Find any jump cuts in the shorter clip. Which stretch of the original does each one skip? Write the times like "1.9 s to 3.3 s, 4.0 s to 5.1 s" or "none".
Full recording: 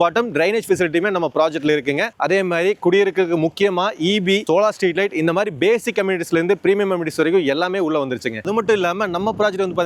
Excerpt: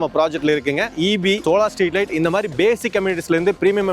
2.1 s to 3.9 s